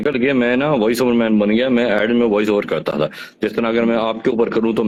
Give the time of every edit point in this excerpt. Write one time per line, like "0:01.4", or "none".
none